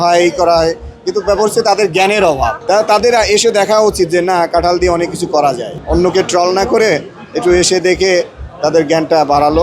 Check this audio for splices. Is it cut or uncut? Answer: cut